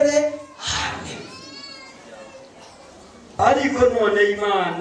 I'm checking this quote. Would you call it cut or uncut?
cut